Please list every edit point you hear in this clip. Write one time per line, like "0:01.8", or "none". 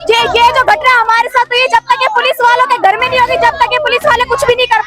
none